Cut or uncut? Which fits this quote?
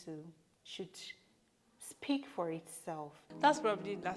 cut